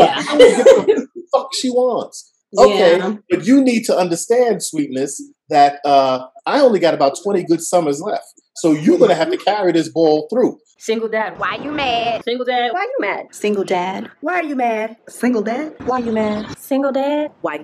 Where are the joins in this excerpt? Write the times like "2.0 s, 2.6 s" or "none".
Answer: 10.6 s